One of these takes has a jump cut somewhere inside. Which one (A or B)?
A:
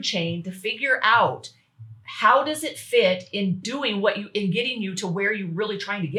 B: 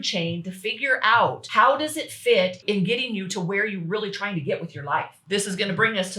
B